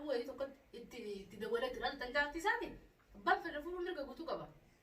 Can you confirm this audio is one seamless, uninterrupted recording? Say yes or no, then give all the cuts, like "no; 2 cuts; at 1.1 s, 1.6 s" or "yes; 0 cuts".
yes; 0 cuts